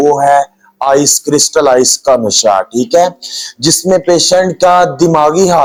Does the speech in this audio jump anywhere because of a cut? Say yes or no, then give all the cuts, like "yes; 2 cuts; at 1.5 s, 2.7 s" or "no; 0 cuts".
no; 0 cuts